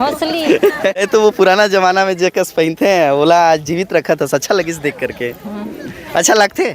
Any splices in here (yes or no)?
yes